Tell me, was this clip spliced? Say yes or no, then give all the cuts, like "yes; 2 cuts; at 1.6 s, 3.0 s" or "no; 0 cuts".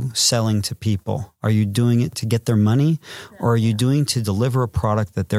yes; 1 cut; at 2.2 s